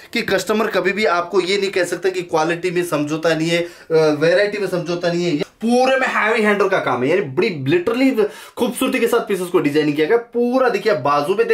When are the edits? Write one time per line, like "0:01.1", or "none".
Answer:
0:05.4